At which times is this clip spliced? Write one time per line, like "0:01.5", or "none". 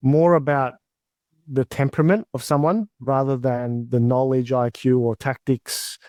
none